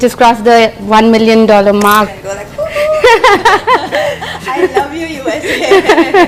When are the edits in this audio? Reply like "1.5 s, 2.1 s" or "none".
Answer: 2.1 s